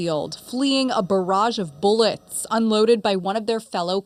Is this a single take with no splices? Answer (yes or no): yes